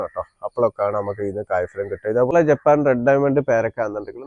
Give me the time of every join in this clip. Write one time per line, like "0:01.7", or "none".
0:02.3